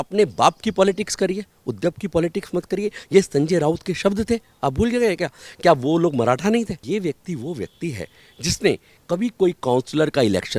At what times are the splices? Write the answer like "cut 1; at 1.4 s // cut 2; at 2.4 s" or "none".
cut 1; at 6.8 s